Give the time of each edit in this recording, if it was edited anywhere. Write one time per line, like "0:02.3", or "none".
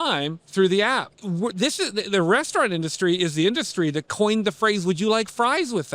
0:01.1